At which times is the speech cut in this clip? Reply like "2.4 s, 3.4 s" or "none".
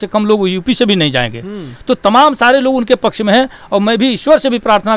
none